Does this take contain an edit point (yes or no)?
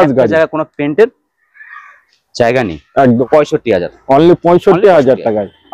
yes